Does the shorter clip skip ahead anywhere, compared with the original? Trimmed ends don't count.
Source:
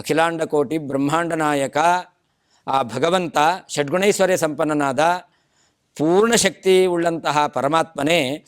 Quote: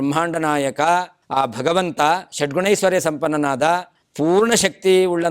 yes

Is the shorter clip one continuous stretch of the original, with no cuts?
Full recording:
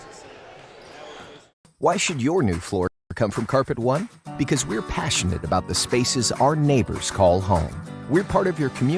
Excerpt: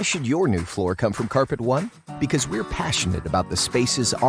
no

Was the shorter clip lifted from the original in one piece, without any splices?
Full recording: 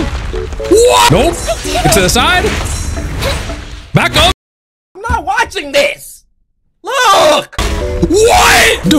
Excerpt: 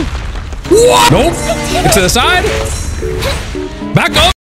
yes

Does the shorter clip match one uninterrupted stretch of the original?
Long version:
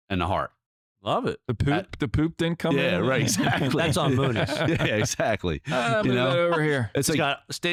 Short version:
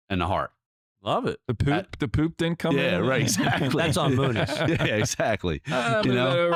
yes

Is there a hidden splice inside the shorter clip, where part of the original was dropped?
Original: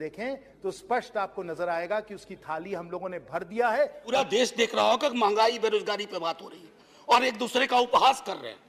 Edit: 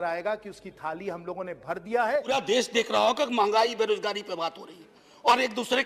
yes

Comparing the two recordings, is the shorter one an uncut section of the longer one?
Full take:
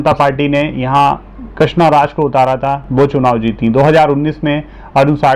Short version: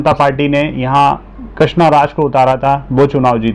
yes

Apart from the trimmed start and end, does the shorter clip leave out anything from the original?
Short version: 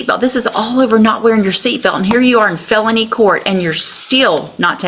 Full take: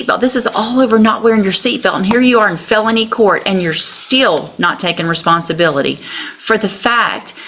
no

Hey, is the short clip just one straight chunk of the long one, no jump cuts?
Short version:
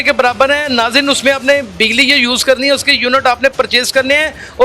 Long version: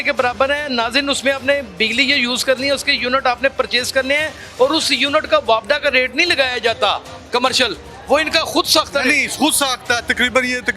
yes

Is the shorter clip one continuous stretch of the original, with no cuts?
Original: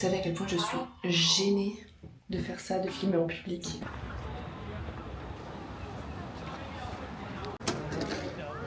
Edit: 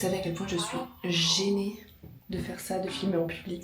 yes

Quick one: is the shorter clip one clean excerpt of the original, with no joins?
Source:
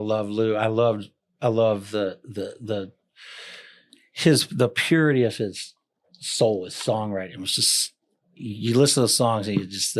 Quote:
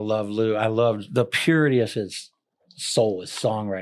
no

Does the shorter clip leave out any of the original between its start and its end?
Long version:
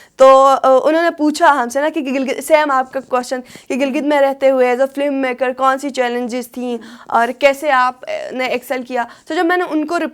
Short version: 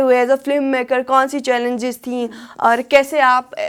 no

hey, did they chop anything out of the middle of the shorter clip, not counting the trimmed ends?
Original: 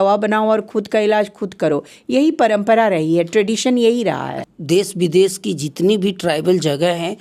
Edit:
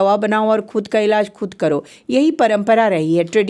no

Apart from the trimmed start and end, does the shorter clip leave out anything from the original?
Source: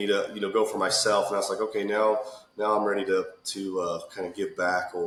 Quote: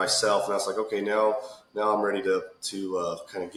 no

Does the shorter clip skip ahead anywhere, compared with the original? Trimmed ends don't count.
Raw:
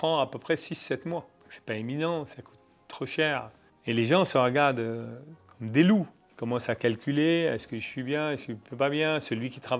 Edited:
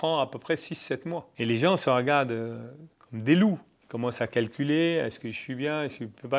yes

